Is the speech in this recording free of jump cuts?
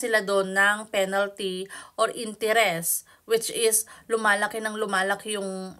yes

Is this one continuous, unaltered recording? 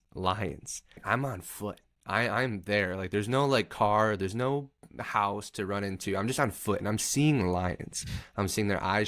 no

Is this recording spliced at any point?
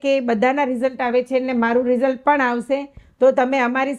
no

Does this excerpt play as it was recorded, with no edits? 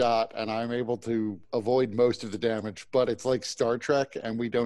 no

